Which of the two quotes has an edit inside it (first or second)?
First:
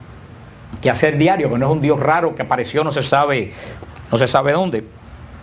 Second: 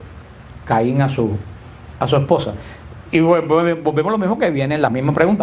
second